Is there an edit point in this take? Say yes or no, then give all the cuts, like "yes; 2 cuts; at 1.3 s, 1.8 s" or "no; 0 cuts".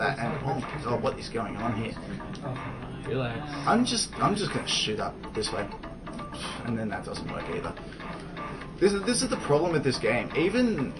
no; 0 cuts